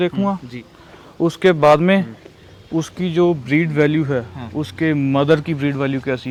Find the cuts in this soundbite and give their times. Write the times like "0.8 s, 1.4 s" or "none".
none